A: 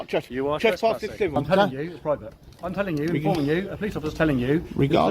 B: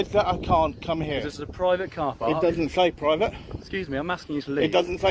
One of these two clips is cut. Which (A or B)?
A